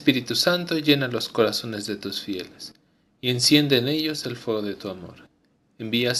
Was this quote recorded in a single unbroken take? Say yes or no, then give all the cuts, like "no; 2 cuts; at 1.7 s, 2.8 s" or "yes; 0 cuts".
yes; 0 cuts